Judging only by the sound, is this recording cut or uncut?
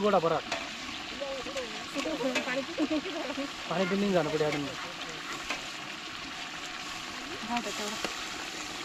uncut